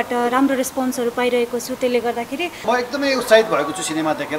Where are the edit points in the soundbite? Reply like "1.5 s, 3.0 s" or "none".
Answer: 2.6 s